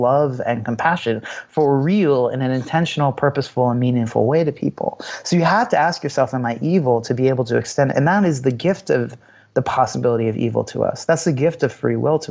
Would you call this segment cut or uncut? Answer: uncut